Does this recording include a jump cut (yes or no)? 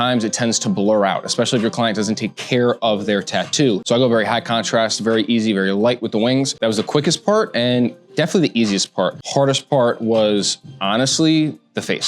yes